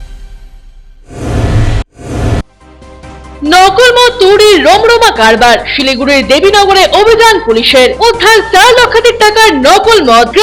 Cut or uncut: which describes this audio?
uncut